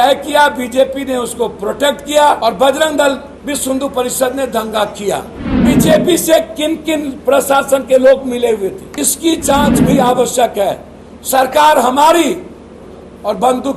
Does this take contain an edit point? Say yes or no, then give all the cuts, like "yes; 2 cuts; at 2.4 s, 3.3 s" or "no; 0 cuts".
yes; 4 cuts; at 2.4 s, 3.3 s, 5.5 s, 8.8 s